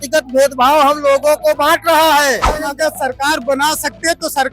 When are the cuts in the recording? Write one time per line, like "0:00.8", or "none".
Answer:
0:02.6